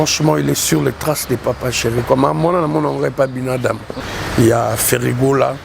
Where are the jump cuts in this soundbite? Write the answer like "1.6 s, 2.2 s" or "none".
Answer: 3.9 s